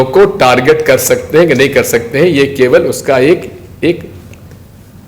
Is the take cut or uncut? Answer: uncut